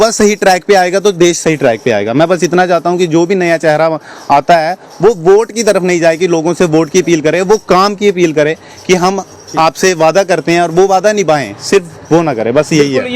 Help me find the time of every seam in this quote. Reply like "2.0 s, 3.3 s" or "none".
none